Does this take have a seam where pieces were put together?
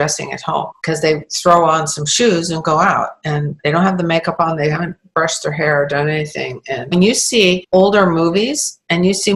no; 0 cuts

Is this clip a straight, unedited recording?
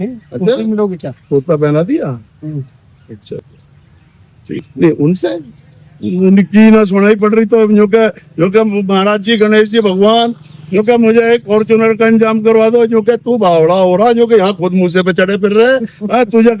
yes; 0 cuts

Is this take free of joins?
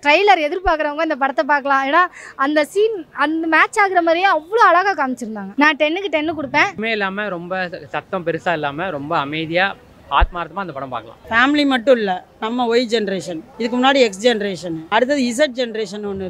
no; 5 cuts; at 5.4 s, 6.8 s, 11.1 s, 13.4 s, 14.7 s

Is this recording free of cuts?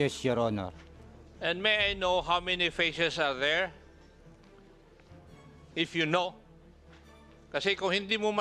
no; 2 cuts; at 3.9 s, 5.7 s

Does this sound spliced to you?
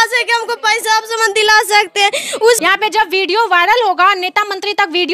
yes; 1 cut; at 2.6 s

